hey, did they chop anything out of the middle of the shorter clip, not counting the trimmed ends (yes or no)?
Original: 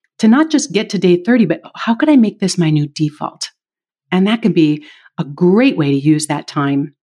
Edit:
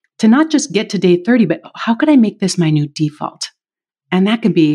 no